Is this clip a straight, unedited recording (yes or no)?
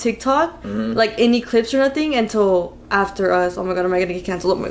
yes